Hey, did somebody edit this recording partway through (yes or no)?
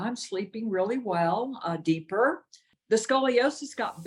yes